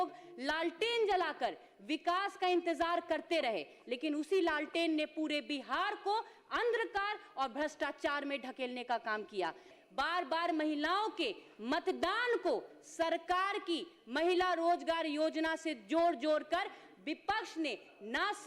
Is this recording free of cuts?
no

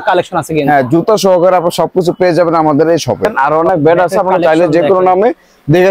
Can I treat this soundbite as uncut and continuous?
no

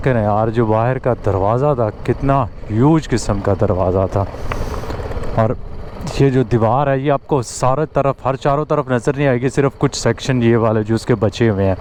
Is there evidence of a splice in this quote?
no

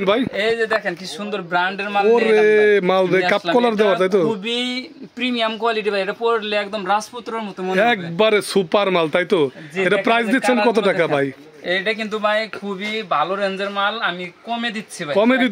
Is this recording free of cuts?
yes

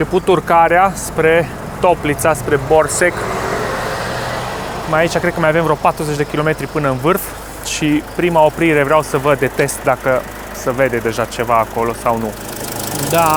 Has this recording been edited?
no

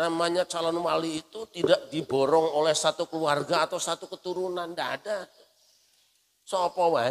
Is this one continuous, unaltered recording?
yes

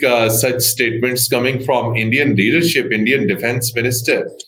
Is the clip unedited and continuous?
yes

